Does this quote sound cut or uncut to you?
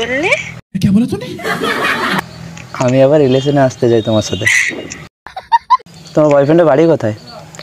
cut